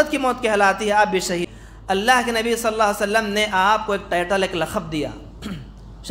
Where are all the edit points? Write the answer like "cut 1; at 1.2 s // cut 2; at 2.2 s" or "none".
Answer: cut 1; at 1.5 s